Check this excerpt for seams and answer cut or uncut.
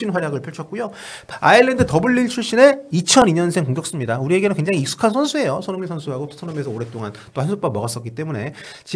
cut